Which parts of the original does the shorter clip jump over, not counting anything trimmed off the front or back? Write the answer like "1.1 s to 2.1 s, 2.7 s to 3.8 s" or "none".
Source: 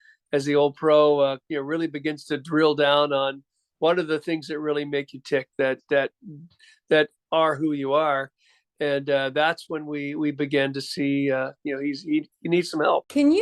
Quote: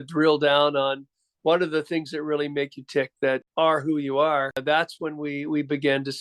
5.8 s to 7.2 s, 8.3 s to 9.3 s